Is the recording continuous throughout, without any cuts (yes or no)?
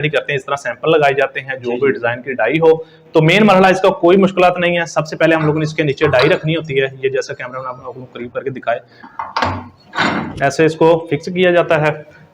yes